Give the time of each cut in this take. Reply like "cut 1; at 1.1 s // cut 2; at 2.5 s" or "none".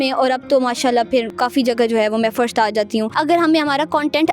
cut 1; at 1.3 s // cut 2; at 3.1 s